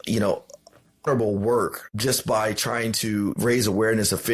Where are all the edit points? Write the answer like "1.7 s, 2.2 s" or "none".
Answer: 1.0 s, 1.9 s, 3.4 s